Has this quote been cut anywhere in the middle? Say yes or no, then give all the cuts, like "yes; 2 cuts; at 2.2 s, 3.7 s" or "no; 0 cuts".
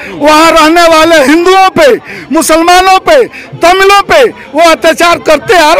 no; 0 cuts